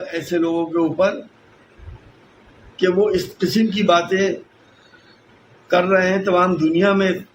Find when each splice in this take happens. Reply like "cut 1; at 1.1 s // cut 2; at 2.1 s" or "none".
none